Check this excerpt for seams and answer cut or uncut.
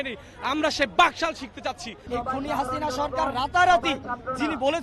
cut